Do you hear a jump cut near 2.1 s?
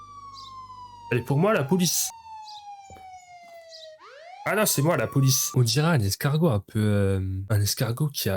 yes; 2 cuts; at 2.1 s, 5.5 s

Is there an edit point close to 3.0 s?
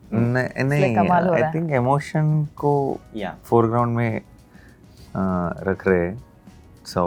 no; 0 cuts

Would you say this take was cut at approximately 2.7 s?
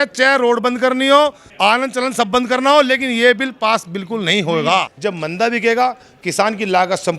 no; 2 cuts; at 1.4 s, 4.9 s

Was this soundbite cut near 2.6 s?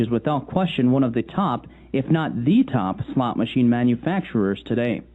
no; 1 cut; at 3.9 s

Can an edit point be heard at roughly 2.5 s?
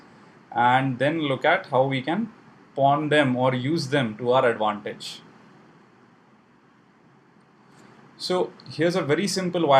no; 1 cut; at 6.8 s

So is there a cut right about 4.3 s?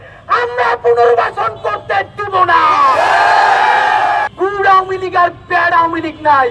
yes; 1 cut; at 4.3 s

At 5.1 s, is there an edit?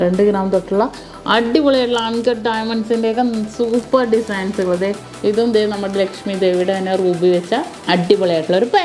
yes; 2 cuts; at 5.1 s, 7.7 s

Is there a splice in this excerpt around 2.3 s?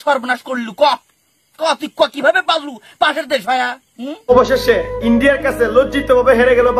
no; 1 cut; at 4.3 s

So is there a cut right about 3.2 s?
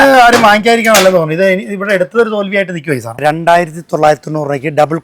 yes; 1 cut; at 3.2 s

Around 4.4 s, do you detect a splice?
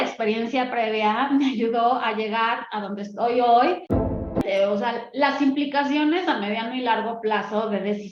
yes; 1 cut; at 4.4 s

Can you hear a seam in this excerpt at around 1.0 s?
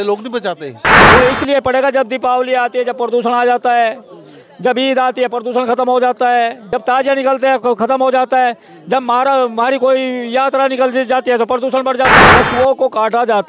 yes; 2 cuts; at 1.0 s, 12.3 s

